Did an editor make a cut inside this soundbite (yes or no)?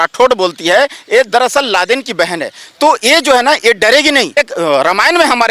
yes